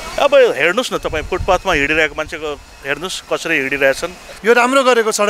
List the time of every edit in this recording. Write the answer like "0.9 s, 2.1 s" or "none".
4.3 s

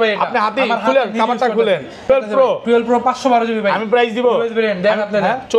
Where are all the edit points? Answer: 2.1 s

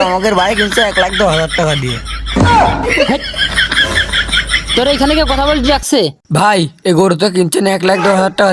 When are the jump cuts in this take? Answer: none

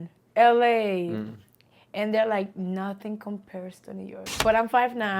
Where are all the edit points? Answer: 4.2 s

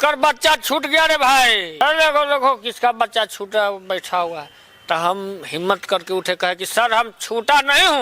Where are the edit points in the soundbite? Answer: 1.8 s

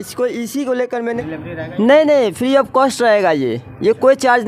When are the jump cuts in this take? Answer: 1.2 s

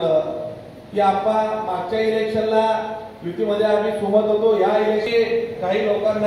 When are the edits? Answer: 5.1 s

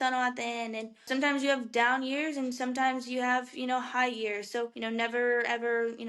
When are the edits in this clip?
1.1 s, 4.8 s

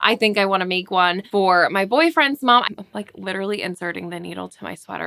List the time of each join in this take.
1.2 s, 2.6 s

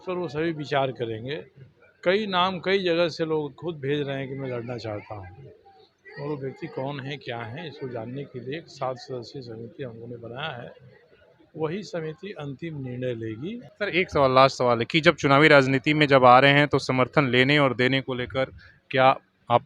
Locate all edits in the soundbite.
13.7 s

